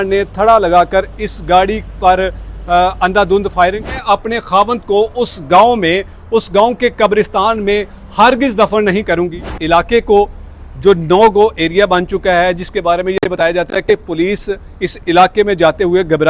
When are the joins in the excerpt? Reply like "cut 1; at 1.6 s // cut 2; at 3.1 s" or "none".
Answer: cut 1; at 4.0 s // cut 2; at 9.5 s

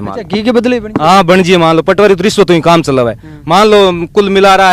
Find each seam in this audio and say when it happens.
none

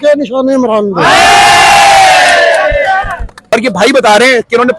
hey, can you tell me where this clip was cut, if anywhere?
cut 1; at 3.5 s

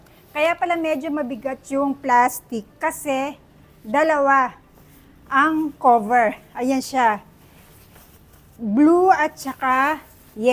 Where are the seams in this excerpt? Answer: none

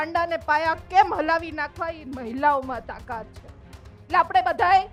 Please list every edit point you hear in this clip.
none

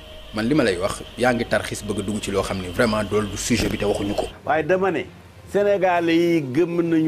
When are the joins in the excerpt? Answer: cut 1; at 4.3 s

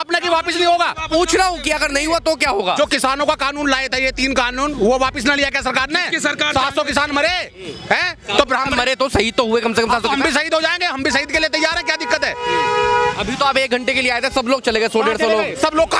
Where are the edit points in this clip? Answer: none

